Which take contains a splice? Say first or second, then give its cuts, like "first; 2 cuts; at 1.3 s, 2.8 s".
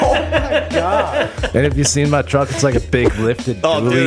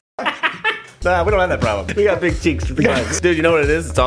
second; 3 cuts; at 1.0 s, 1.9 s, 3.1 s